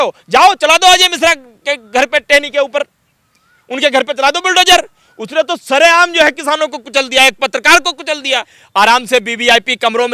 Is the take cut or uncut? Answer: cut